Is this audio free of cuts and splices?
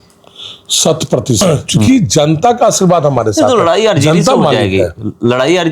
no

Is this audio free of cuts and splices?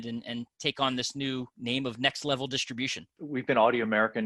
no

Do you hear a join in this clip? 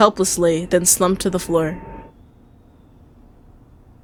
no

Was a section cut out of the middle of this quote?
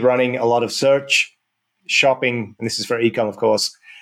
no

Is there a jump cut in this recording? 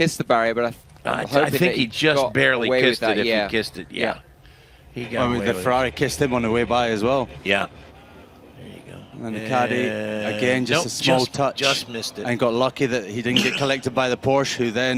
no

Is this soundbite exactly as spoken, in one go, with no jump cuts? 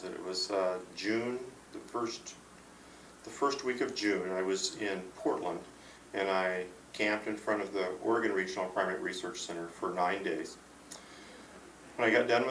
no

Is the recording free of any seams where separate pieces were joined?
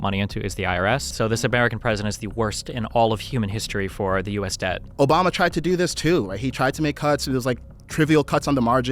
no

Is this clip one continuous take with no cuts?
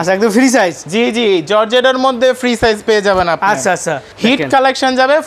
no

